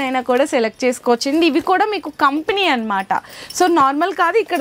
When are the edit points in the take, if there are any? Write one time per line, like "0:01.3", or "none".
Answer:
none